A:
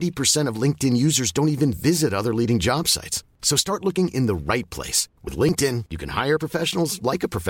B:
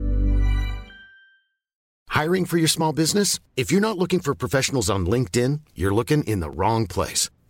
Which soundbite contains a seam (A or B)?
B